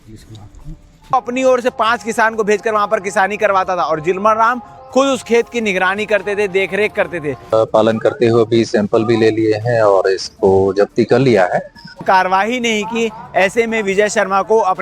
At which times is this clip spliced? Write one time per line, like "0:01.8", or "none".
0:01.1
0:07.5
0:11.9